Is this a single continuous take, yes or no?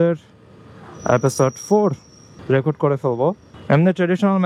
yes